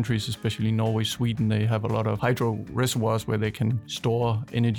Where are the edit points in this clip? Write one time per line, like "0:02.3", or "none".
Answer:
0:02.2